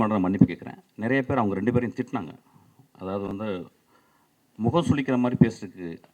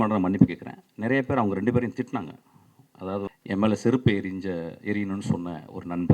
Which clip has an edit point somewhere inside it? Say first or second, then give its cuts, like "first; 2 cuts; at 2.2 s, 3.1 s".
second; 1 cut; at 3.3 s